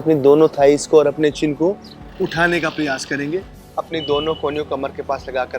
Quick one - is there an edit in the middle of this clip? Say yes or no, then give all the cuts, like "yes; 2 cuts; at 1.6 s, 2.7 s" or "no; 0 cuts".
yes; 1 cut; at 3.6 s